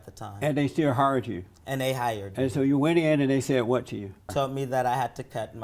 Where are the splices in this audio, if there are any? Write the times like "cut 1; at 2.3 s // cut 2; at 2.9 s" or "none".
cut 1; at 4.3 s